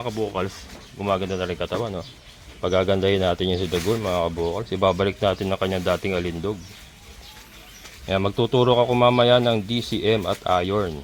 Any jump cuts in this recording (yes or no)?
no